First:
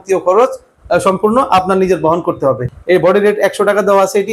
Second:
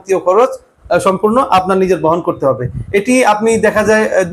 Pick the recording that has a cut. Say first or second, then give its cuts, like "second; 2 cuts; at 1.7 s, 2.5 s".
first; 1 cut; at 2.7 s